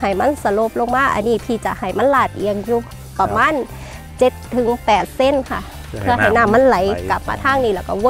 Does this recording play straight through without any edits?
yes; 0 cuts

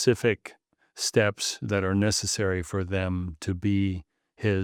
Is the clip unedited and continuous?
yes; 0 cuts

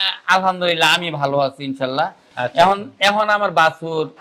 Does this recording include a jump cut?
yes; 1 cut; at 2.2 s

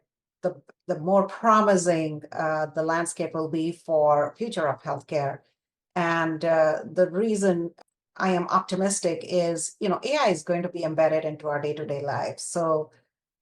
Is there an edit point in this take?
yes; 1 cut; at 7.8 s

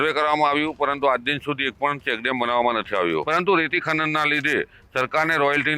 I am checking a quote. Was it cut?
yes; 1 cut; at 3.2 s

